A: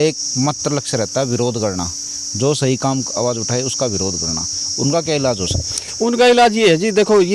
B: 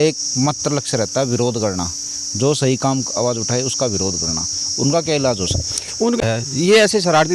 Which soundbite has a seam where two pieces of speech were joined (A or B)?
B